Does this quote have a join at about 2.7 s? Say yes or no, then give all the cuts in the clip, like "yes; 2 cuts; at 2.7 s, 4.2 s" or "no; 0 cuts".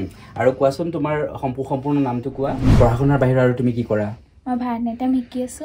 yes; 1 cut; at 2.7 s